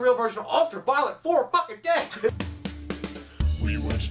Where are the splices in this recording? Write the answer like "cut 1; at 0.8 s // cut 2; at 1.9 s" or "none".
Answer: cut 1; at 2.3 s